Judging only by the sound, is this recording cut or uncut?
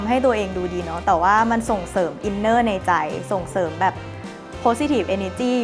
uncut